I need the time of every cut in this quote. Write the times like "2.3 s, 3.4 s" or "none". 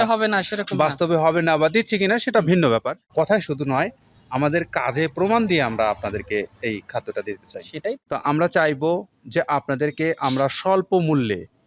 3.1 s, 8.0 s